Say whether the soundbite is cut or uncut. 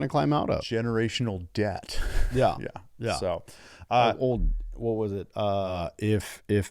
cut